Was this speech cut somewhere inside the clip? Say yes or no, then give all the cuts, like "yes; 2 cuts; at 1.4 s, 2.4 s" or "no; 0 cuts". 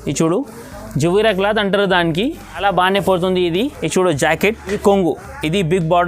yes; 3 cuts; at 2.6 s, 3.8 s, 4.7 s